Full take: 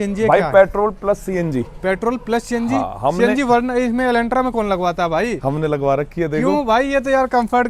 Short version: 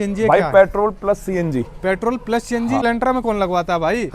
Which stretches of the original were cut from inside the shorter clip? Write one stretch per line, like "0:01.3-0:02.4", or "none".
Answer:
0:02.8-0:04.1